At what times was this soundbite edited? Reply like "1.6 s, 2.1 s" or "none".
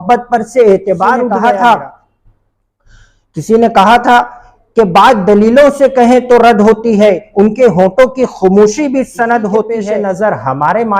1.3 s, 9.8 s